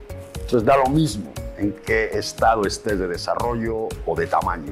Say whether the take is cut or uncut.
uncut